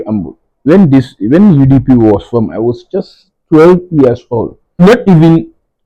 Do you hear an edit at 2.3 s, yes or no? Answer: no